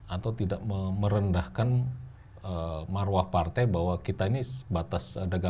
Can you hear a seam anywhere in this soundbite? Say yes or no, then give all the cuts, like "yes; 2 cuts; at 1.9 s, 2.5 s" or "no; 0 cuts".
no; 0 cuts